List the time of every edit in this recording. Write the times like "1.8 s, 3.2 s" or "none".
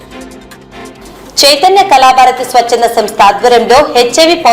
0.9 s